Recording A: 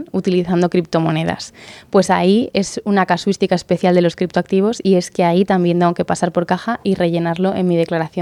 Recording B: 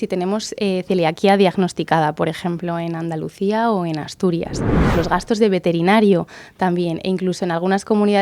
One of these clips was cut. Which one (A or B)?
B